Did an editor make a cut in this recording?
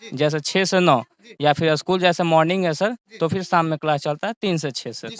no; 0 cuts

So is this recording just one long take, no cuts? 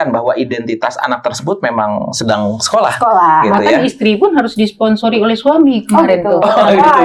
yes; 0 cuts

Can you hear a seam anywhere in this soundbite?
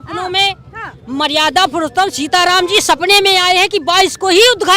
no; 0 cuts

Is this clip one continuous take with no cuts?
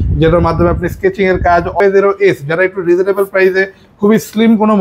no; 1 cut; at 1.8 s

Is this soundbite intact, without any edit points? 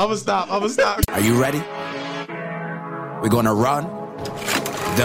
no; 1 cut; at 1.0 s

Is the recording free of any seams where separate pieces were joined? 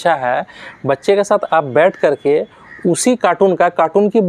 yes; 0 cuts

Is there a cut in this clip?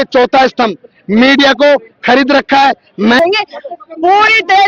yes; 1 cut; at 3.2 s

